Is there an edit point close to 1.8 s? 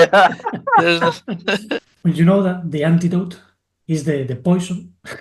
yes; 1 cut; at 1.8 s

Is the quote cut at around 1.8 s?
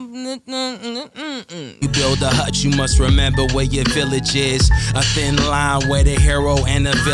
yes; 1 cut; at 1.8 s

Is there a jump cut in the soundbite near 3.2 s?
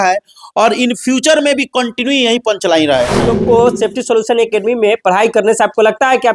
yes; 1 cut; at 3.2 s

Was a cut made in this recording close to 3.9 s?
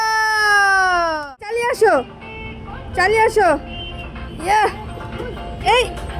no; 1 cut; at 1.2 s

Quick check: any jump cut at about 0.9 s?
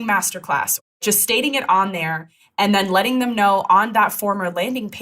yes; 1 cut; at 0.9 s

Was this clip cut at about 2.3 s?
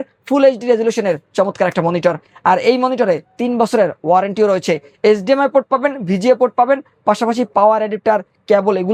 no; 0 cuts

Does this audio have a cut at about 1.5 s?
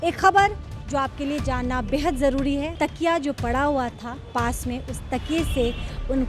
no; 1 cut; at 2.7 s

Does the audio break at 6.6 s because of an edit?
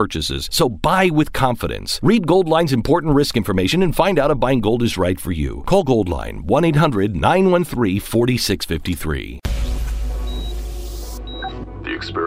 no; 1 cut; at 9.4 s

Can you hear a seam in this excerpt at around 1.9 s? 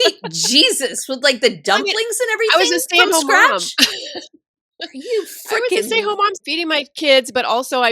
no; 1 cut; at 6.4 s

